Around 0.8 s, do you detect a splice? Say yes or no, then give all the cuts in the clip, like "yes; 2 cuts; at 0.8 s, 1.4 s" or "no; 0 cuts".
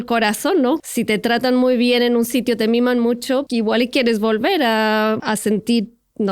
yes; 3 cuts; at 0.8 s, 3.5 s, 5.2 s